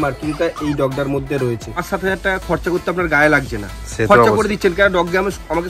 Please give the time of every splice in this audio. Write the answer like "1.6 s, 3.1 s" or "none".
1.8 s